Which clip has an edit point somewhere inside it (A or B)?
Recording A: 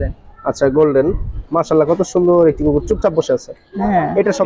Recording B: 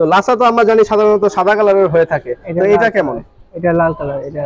A